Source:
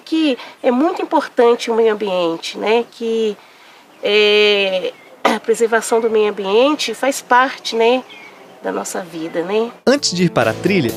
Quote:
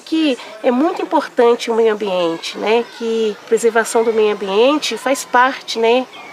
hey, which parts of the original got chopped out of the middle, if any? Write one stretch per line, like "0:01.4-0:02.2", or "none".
0:03.4-0:05.4